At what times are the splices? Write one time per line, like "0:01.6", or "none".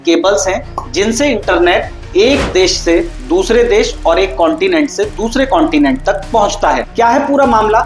0:06.9